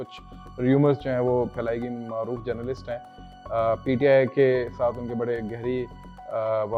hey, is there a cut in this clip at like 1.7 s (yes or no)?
no